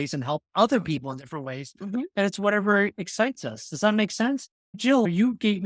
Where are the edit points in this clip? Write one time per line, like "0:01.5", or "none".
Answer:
none